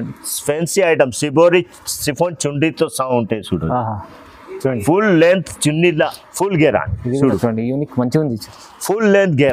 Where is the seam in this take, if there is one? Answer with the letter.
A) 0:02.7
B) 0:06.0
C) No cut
B